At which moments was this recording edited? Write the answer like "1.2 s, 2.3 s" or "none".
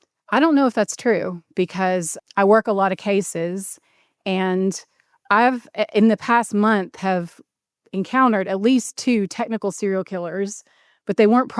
2.1 s